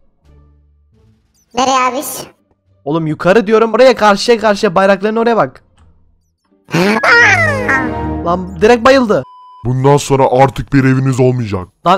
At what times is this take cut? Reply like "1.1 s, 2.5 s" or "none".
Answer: 3.8 s, 9.6 s